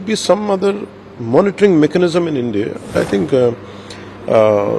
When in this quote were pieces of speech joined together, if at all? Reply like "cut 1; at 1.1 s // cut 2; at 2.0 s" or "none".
cut 1; at 2.9 s

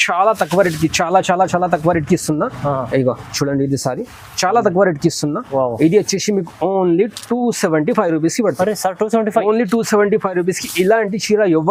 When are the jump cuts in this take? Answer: none

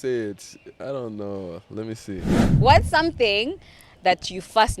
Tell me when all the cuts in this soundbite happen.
cut 1; at 2.4 s

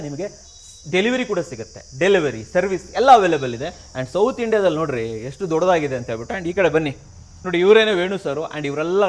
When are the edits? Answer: none

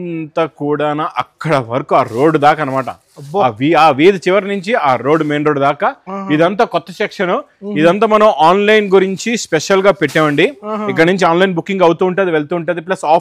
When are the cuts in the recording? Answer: none

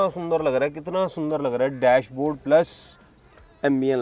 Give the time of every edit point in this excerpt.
none

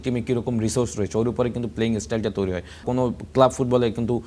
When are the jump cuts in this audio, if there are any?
cut 1; at 2.8 s

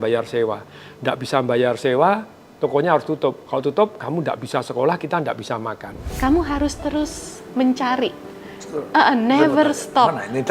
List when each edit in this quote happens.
cut 1; at 6.1 s

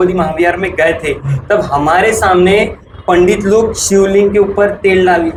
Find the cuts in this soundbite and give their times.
none

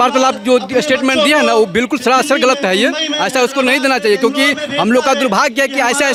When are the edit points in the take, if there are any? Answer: none

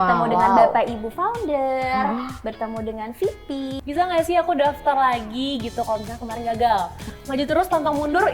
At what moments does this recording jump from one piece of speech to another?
cut 1; at 3.8 s // cut 2; at 7.1 s

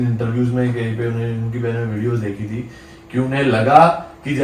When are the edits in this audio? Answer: none

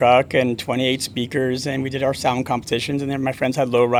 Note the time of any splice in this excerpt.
none

